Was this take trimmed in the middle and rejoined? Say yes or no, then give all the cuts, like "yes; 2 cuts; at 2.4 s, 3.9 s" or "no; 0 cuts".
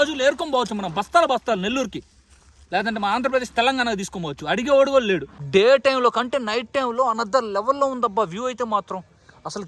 yes; 1 cut; at 5.3 s